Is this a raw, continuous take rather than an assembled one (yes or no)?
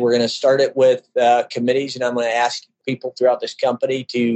no